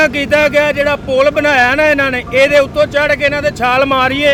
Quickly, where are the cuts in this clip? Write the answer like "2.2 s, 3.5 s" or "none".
none